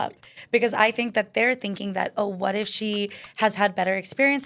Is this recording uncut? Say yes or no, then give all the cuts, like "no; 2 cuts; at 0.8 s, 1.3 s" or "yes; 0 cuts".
yes; 0 cuts